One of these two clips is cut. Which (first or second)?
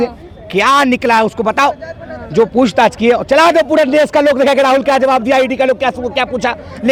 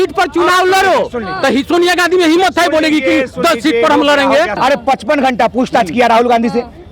second